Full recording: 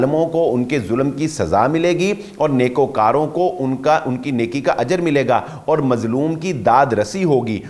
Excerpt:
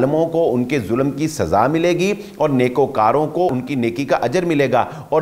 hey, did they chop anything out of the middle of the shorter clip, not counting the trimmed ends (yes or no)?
yes